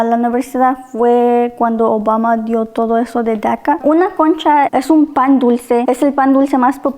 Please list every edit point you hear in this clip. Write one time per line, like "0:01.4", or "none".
0:03.8
0:04.7
0:05.8